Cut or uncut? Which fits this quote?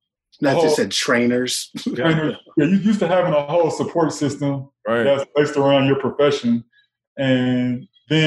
uncut